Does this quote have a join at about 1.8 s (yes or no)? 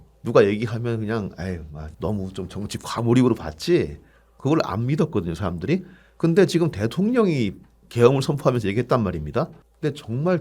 yes